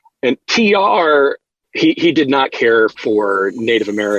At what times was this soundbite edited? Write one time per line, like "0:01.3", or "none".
0:01.5
0:02.9